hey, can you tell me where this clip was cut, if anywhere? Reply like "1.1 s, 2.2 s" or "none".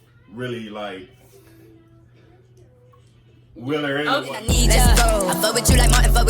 4.4 s